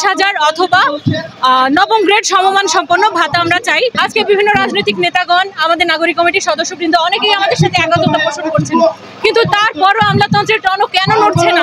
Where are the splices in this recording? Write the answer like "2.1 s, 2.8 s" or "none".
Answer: 4.0 s